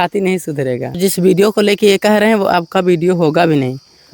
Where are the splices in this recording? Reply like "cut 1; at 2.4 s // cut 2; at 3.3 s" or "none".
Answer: cut 1; at 1.0 s